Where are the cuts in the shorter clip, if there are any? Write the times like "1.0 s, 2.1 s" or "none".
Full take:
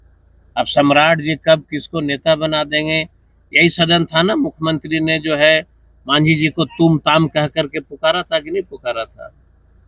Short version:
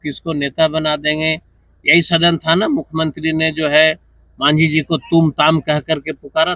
none